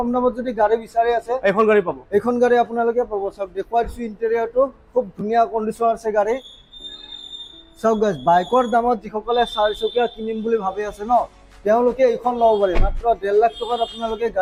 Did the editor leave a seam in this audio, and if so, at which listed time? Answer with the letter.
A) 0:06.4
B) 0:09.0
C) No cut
C